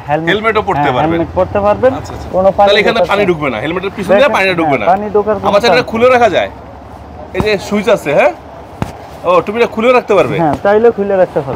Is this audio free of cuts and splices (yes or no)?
yes